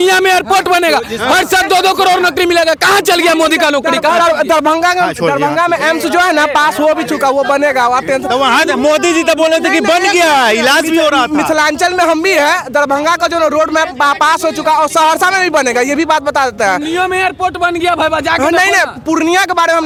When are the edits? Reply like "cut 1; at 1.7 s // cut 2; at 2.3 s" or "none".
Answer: none